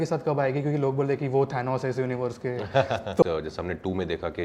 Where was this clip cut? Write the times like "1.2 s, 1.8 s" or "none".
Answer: 3.2 s